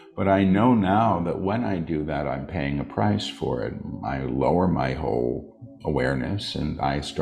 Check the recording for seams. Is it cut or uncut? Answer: uncut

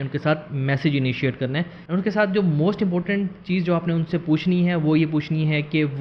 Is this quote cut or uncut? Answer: cut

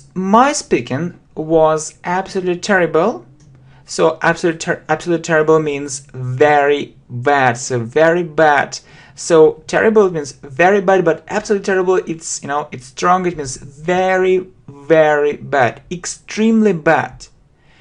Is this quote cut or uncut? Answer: uncut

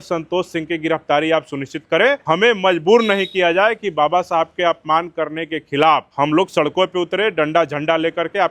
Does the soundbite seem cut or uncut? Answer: cut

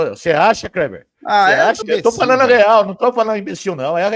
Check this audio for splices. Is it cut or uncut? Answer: cut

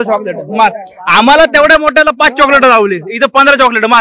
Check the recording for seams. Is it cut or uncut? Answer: uncut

